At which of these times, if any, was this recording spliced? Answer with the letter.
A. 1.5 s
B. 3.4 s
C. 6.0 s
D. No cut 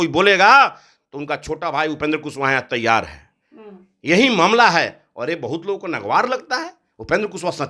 D